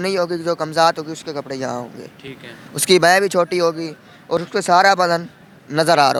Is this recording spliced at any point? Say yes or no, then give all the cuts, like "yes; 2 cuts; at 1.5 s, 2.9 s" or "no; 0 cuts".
no; 0 cuts